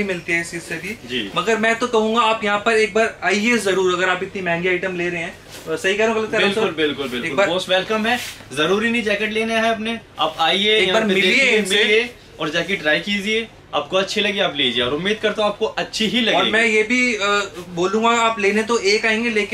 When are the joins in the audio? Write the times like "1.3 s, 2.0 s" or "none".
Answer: none